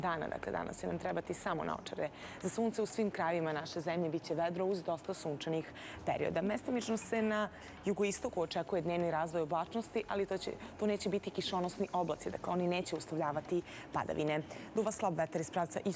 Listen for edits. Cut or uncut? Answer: uncut